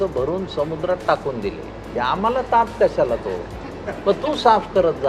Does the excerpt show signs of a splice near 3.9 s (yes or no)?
no